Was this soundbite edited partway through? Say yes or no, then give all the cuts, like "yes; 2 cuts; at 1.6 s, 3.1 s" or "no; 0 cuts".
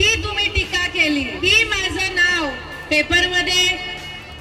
yes; 1 cut; at 1.5 s